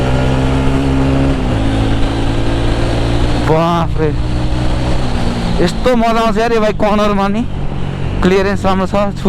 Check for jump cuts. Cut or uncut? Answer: uncut